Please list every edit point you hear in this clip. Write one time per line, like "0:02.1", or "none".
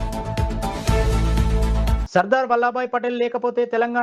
none